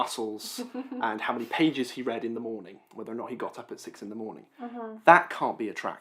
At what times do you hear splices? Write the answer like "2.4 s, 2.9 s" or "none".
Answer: none